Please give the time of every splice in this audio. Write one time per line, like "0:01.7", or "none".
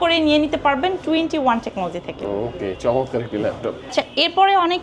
none